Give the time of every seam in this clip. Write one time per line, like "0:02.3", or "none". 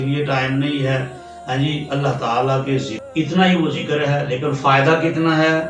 0:02.9